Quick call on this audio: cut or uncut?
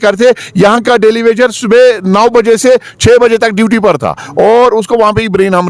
uncut